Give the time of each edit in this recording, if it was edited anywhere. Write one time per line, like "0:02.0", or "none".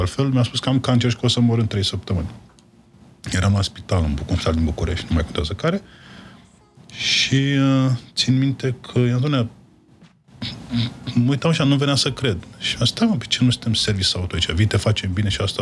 none